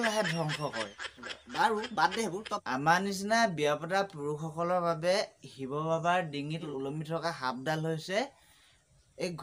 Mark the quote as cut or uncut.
cut